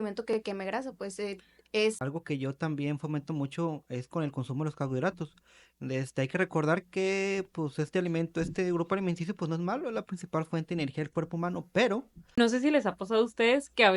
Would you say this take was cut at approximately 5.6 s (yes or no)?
no